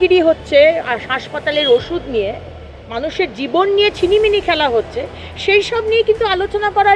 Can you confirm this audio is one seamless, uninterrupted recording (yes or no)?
yes